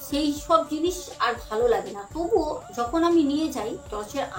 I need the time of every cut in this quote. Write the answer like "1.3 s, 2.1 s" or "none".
2.6 s